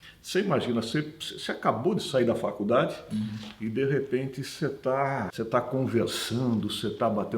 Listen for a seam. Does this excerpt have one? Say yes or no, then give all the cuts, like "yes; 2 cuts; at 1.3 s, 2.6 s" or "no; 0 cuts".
yes; 1 cut; at 5.3 s